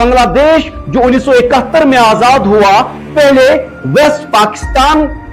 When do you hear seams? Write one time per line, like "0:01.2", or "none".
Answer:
none